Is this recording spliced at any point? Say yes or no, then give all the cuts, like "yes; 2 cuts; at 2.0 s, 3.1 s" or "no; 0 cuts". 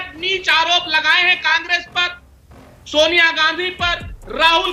no; 0 cuts